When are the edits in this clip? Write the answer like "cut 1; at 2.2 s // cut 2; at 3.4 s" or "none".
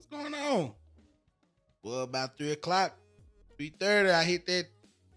none